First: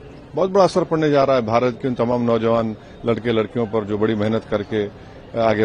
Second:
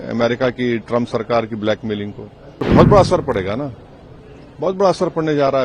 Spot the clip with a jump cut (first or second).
second